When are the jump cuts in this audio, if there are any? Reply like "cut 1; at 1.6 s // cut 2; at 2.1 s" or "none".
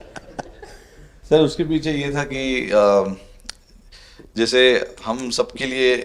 none